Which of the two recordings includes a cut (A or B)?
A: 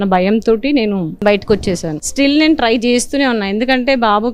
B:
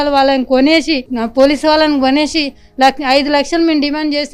A